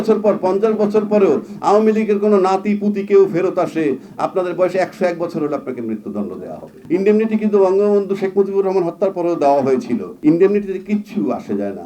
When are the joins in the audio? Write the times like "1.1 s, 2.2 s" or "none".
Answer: 6.7 s, 10.1 s